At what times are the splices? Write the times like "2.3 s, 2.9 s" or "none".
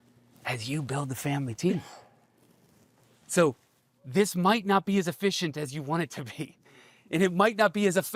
none